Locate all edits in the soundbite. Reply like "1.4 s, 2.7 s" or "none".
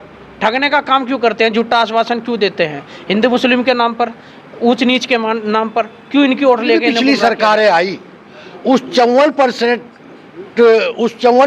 6.9 s